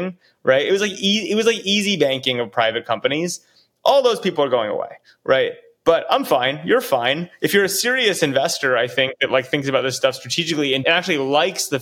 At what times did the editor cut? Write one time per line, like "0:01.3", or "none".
0:10.8